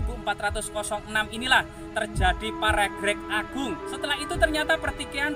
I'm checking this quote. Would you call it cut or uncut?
cut